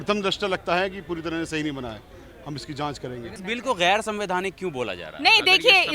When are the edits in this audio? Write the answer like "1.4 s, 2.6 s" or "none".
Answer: 3.3 s